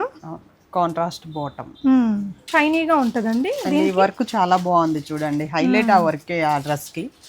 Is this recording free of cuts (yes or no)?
no